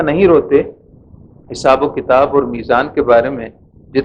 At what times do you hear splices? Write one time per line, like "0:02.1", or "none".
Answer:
none